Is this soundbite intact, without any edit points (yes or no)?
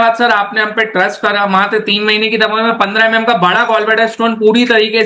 yes